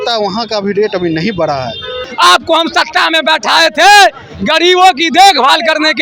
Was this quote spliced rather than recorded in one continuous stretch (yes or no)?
yes